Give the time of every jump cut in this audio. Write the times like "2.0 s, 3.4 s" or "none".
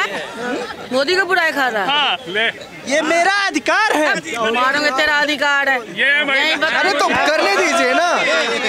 none